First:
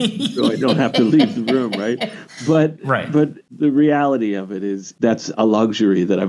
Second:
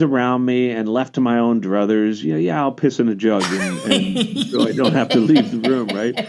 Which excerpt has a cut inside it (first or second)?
first